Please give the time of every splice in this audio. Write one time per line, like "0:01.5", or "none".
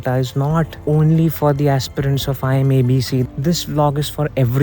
0:03.2